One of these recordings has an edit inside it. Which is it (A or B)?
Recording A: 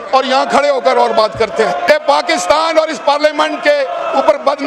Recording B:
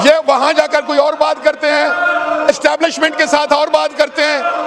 A